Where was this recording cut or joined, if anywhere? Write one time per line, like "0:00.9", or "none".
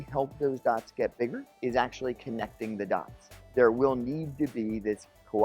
0:01.5
0:03.2